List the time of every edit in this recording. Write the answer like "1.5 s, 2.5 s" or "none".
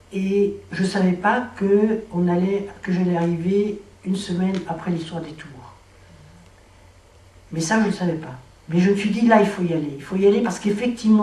none